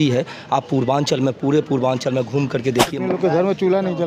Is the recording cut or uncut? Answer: cut